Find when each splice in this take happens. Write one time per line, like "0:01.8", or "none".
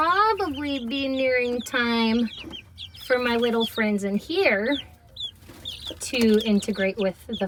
none